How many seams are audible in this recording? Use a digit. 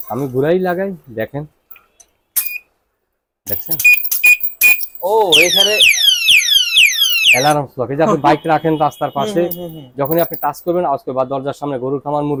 0